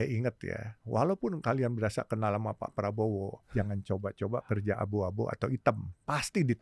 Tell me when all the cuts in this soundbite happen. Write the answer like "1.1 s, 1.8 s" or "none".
3.4 s